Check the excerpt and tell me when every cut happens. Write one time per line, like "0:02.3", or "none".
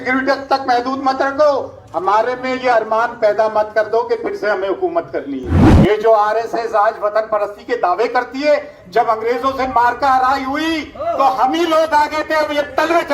0:05.7